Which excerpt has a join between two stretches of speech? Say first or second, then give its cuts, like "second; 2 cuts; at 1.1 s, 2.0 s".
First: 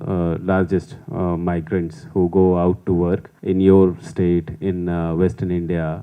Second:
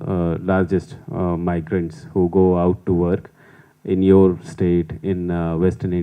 first; 1 cut; at 3.3 s